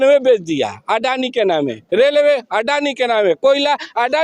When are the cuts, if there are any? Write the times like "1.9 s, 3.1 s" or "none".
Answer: none